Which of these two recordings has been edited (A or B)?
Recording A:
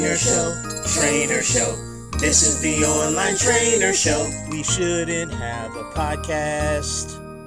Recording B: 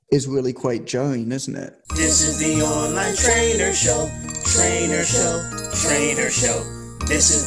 B